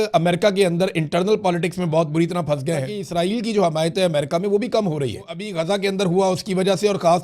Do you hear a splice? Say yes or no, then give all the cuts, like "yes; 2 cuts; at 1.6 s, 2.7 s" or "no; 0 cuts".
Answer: yes; 2 cuts; at 3.0 s, 5.4 s